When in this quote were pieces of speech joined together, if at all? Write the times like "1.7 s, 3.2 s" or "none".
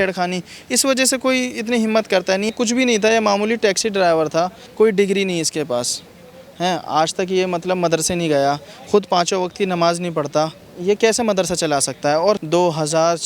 2.5 s, 4.6 s, 10.6 s, 12.4 s